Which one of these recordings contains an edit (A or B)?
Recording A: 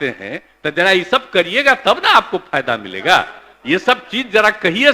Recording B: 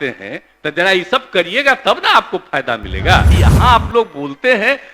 B